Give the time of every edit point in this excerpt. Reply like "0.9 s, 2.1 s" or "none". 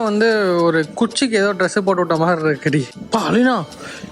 2.8 s